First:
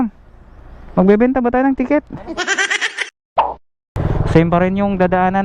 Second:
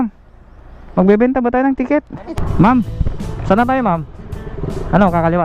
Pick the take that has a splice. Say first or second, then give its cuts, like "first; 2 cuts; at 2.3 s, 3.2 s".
second; 1 cut; at 2.4 s